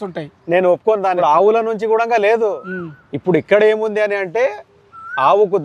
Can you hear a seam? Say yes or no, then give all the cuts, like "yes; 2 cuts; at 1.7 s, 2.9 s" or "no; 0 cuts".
yes; 1 cut; at 1.2 s